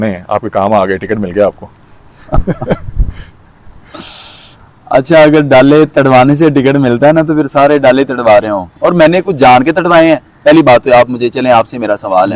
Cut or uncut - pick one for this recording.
uncut